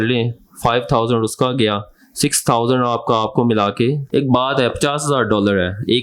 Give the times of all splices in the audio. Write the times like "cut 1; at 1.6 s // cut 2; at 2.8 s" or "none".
cut 1; at 4.0 s